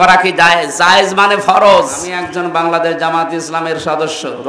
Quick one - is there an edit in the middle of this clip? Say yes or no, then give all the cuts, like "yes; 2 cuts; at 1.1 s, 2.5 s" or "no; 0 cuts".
yes; 1 cut; at 2.1 s